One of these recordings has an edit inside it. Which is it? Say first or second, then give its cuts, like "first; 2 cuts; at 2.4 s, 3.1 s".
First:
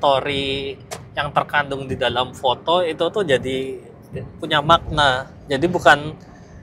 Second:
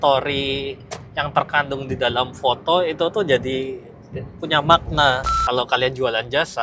second; 1 cut; at 5.3 s